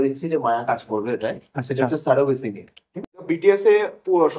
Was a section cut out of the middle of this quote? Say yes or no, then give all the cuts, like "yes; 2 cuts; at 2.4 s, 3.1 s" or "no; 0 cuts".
yes; 1 cut; at 3.1 s